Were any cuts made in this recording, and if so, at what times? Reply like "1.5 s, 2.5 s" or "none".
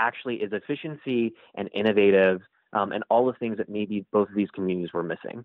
none